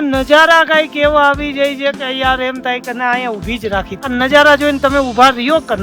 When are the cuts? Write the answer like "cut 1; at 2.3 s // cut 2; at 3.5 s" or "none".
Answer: cut 1; at 3.9 s